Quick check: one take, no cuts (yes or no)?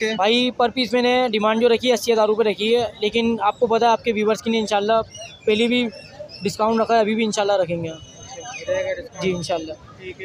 yes